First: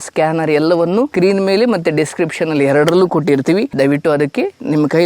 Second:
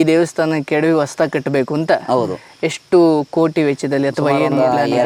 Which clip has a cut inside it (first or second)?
first